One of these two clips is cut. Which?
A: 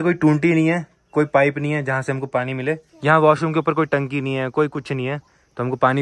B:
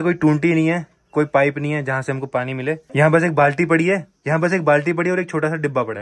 A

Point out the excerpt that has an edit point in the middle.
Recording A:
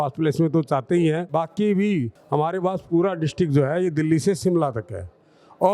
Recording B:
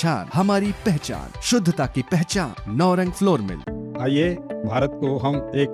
A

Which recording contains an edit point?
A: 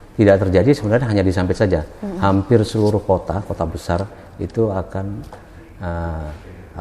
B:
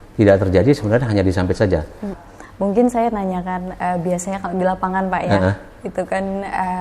B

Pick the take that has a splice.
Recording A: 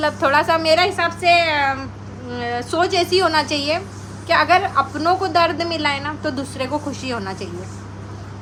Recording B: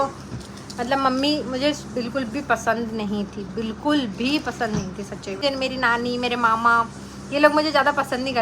B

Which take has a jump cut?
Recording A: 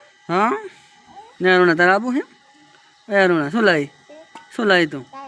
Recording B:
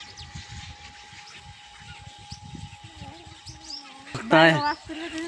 B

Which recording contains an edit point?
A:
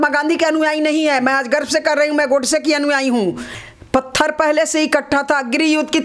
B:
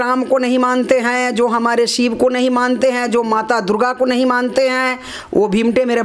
A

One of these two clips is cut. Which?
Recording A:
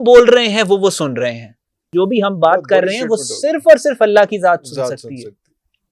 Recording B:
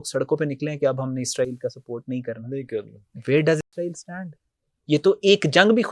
A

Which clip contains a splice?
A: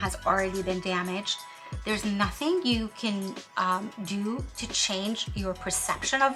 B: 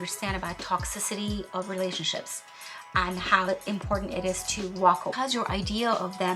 B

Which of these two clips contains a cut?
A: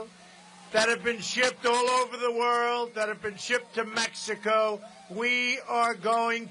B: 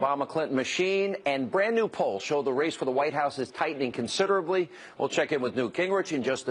B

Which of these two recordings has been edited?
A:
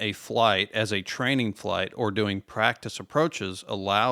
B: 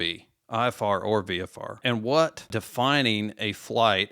B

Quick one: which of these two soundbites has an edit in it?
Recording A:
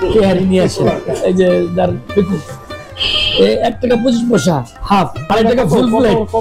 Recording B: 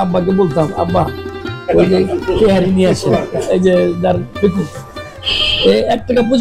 A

